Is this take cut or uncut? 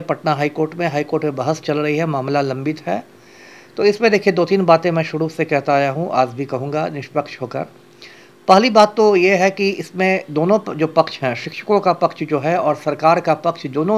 uncut